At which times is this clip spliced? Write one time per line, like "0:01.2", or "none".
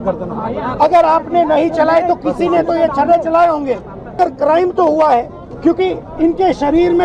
0:04.2
0:05.4